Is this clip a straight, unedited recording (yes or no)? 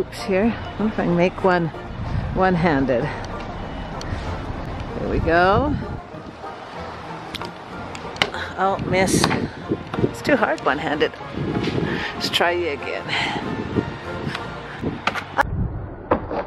yes